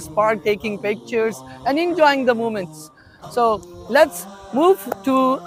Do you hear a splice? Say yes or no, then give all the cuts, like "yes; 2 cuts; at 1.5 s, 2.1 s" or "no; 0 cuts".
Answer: no; 0 cuts